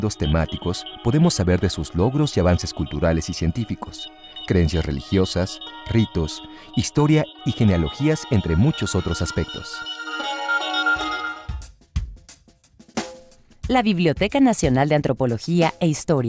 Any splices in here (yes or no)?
no